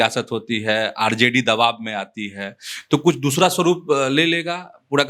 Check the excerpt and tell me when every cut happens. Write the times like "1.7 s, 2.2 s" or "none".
none